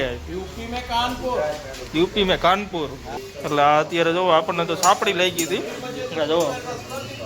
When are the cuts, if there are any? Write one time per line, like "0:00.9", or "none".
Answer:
0:03.0

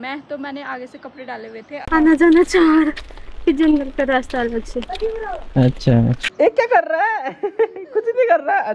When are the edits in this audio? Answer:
0:01.7
0:06.3

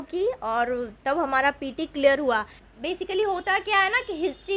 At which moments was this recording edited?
0:02.6

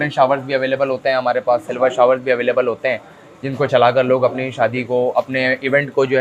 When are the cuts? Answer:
none

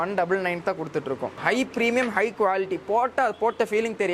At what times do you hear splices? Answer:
0:01.4

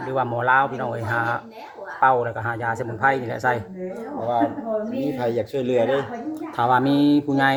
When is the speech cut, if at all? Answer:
none

